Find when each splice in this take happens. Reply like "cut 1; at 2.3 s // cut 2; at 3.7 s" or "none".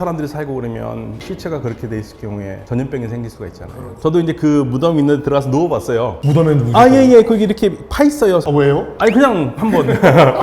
cut 1; at 4.0 s // cut 2; at 8.5 s